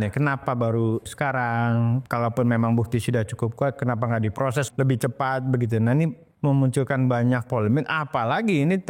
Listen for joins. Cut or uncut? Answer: cut